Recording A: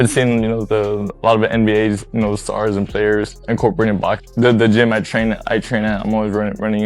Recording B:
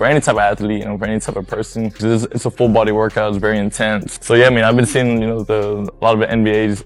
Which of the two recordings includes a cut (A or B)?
A